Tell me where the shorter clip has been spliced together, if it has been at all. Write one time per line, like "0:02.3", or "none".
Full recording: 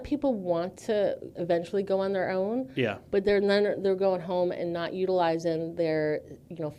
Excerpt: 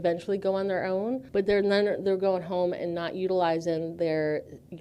0:01.2